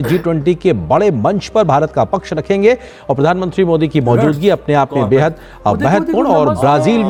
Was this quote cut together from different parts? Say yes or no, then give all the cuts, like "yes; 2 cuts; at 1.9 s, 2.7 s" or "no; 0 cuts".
no; 0 cuts